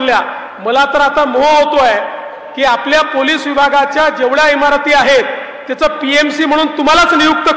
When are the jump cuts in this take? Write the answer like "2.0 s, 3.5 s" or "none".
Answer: none